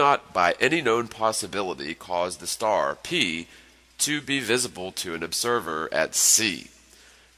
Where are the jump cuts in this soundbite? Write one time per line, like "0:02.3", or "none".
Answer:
0:04.8